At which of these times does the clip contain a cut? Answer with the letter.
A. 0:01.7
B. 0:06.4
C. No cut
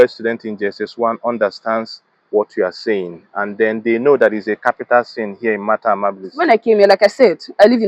B